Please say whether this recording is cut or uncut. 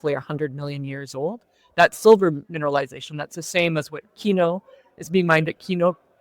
uncut